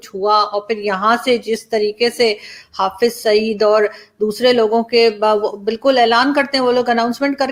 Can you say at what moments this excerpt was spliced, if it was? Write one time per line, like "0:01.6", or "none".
none

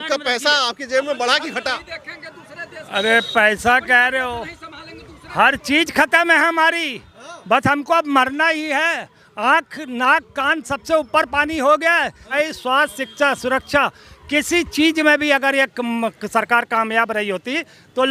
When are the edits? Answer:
none

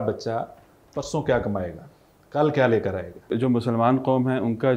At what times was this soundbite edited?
0:03.3

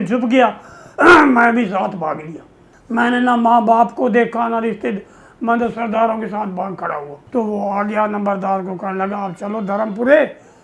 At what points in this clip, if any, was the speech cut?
0:07.1

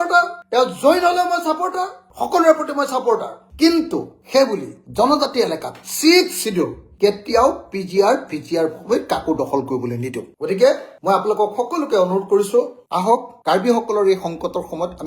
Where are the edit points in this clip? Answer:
none

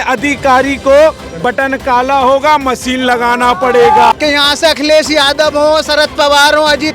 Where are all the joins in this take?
0:04.1

